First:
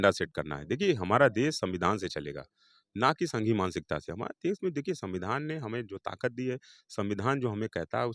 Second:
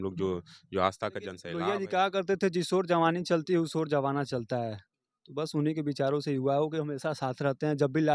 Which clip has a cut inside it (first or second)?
second